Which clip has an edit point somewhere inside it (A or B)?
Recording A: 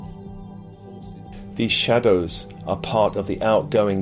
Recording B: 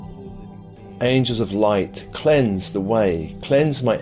A